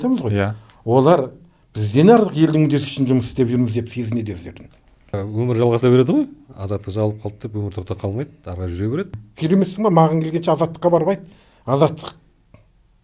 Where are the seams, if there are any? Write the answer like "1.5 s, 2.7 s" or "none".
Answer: 5.2 s, 9.1 s